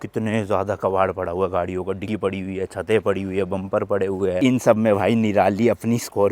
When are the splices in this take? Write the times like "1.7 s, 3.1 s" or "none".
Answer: 4.4 s